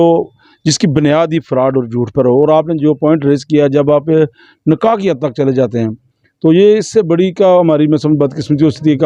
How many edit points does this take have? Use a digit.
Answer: 0